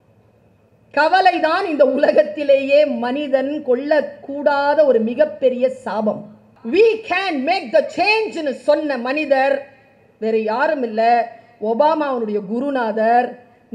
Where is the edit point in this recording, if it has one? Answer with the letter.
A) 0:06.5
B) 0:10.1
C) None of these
A